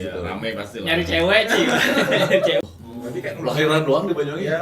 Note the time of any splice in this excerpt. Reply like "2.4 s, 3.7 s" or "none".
2.6 s